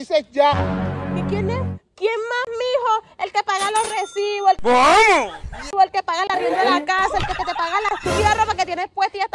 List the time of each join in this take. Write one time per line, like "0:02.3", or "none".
none

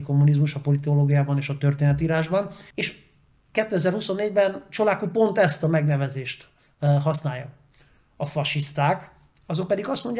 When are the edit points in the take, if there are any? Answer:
0:02.6

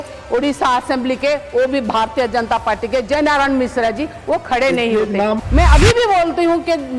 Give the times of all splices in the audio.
0:05.4

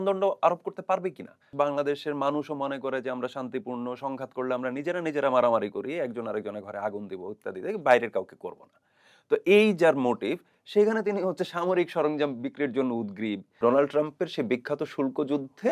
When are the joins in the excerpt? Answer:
0:01.5
0:13.5

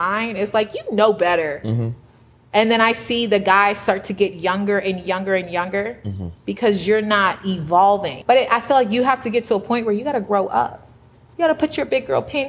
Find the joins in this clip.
0:08.1

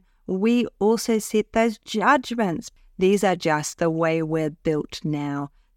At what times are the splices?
0:02.7

